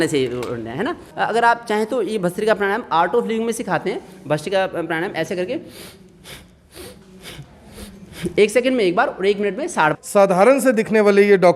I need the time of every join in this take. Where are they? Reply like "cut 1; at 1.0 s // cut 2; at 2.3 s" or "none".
cut 1; at 1.0 s // cut 2; at 10.0 s